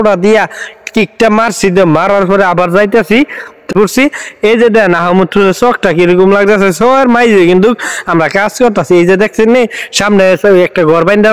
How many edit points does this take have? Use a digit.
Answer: 1